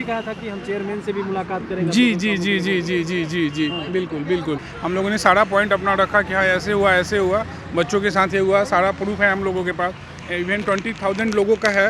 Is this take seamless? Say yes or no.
no